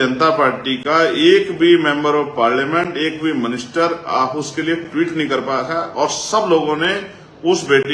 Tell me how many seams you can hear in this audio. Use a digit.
0